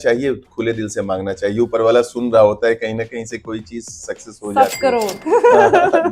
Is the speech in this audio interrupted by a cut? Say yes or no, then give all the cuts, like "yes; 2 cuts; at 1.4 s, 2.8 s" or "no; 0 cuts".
no; 0 cuts